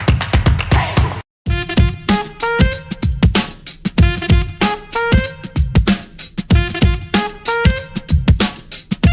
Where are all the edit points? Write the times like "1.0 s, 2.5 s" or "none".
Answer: none